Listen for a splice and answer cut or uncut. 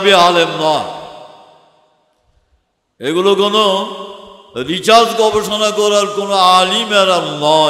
uncut